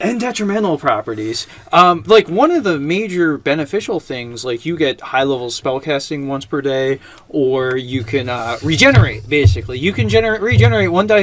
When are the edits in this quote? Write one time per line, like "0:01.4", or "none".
0:07.7